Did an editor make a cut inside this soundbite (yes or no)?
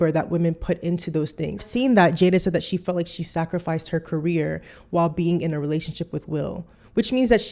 yes